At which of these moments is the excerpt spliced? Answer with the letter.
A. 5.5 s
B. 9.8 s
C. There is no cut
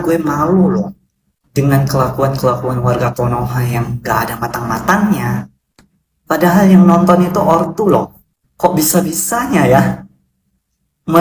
C